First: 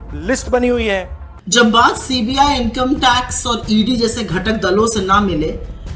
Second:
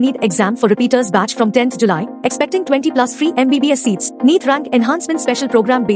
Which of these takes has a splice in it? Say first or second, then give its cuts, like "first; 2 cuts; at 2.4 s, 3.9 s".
first; 1 cut; at 1.2 s